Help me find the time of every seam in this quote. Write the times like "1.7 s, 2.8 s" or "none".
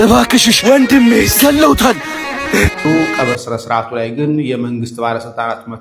2.8 s